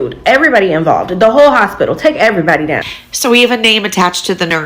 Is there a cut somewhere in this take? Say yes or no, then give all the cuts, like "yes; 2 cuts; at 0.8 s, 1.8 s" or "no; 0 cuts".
yes; 1 cut; at 2.9 s